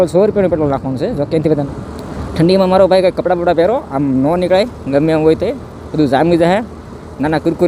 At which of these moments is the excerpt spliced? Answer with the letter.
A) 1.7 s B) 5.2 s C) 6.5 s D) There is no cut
A